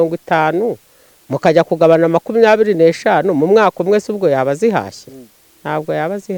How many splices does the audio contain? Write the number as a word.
zero